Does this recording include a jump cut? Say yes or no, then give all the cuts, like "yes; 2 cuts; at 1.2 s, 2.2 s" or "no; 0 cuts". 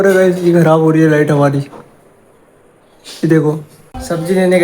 yes; 1 cut; at 3.7 s